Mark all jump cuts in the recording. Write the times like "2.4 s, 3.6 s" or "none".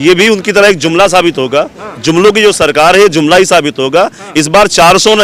none